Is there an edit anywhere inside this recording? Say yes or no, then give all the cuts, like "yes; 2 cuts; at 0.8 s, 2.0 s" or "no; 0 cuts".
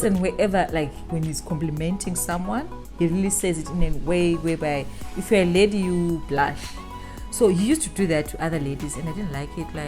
no; 0 cuts